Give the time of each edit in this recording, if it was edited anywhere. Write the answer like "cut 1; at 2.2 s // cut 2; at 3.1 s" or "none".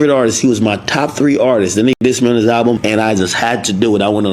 cut 1; at 2.8 s

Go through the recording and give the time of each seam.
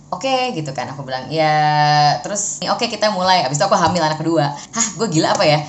cut 1; at 2.6 s // cut 2; at 4.7 s

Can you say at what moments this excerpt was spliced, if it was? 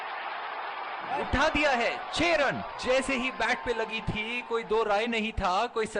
cut 1; at 1.3 s

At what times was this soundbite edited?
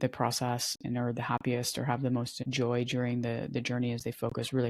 cut 1; at 2.4 s

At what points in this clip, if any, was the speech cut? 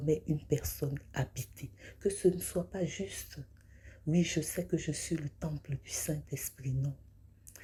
none

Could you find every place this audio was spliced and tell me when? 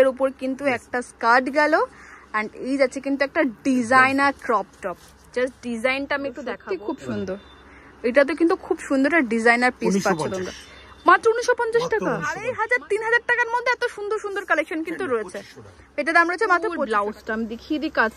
cut 1; at 6.6 s // cut 2; at 12.5 s // cut 3; at 16.8 s

